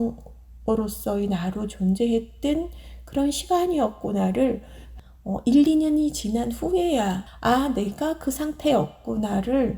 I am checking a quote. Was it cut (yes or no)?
yes